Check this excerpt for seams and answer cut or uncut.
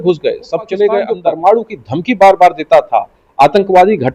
cut